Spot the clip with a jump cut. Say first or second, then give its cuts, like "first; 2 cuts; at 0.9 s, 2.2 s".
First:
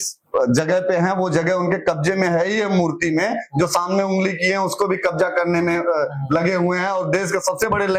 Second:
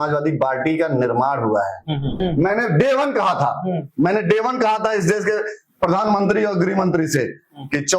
second; 1 cut; at 2.2 s